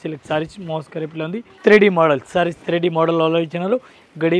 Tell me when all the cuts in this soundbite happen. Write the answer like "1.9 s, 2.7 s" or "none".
1.4 s